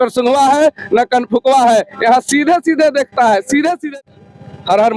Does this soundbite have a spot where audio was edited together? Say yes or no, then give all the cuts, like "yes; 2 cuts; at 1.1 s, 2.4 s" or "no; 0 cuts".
yes; 1 cut; at 3.9 s